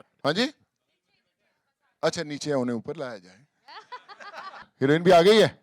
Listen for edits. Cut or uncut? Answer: cut